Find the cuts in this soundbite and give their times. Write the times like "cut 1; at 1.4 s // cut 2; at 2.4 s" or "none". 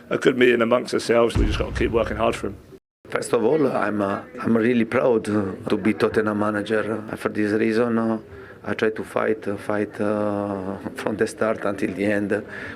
cut 1; at 1.3 s // cut 2; at 4.3 s // cut 3; at 7.1 s